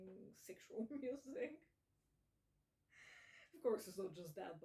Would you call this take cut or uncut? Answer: uncut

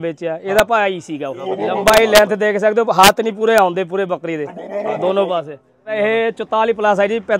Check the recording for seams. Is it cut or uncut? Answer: cut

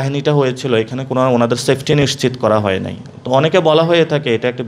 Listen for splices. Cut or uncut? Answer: uncut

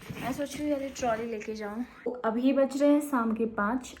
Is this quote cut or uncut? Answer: cut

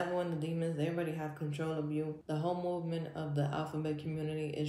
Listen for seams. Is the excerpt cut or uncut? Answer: cut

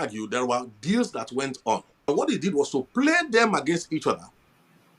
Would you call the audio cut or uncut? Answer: cut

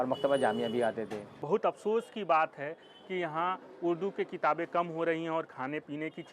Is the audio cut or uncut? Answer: cut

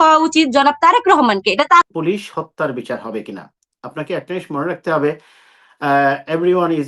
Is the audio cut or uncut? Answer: cut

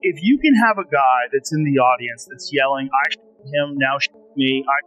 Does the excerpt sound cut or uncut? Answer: uncut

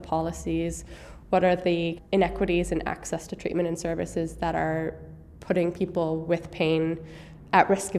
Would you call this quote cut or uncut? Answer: cut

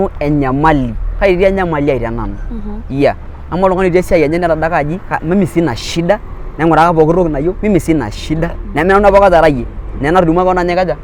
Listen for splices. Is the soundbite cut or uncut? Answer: uncut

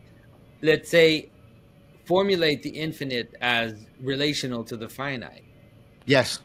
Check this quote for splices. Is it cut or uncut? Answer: uncut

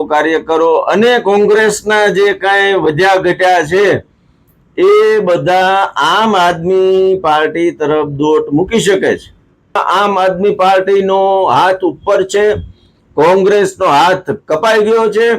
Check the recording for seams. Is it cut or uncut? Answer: cut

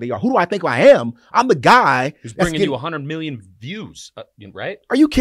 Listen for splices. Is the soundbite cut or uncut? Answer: uncut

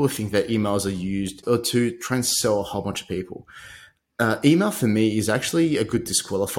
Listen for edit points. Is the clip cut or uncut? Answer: cut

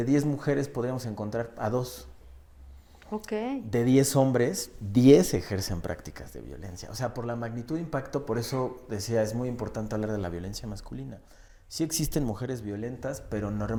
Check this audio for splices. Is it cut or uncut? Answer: uncut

